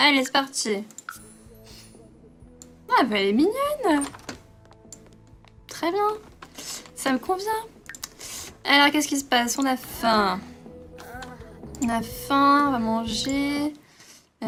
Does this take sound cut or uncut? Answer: uncut